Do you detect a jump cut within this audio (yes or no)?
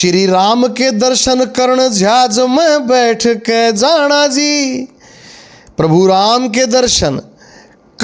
no